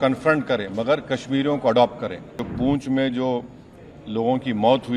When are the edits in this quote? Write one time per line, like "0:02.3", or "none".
0:02.4